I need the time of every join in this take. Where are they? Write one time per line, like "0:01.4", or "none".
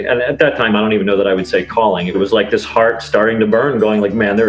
0:02.2